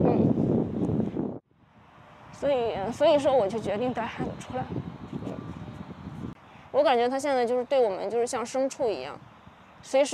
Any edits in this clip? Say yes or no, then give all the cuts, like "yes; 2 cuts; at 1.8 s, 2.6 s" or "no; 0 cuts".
yes; 2 cuts; at 1.2 s, 6.4 s